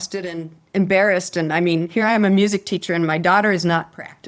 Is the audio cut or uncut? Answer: uncut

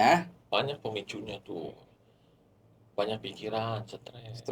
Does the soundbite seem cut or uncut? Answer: uncut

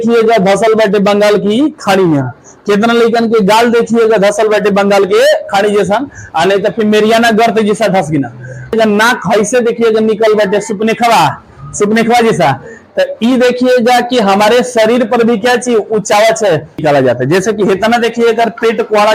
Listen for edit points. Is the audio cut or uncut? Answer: cut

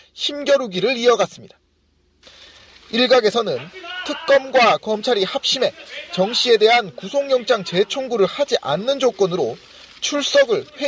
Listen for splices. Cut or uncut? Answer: cut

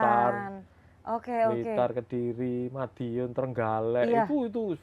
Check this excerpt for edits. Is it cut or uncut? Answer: uncut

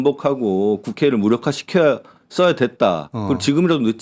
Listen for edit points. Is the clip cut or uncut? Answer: uncut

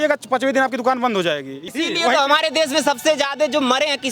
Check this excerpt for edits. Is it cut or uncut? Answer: cut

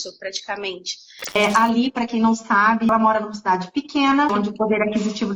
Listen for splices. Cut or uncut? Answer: cut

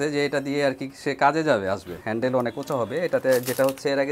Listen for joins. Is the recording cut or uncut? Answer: cut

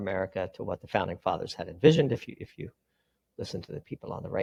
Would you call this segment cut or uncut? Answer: uncut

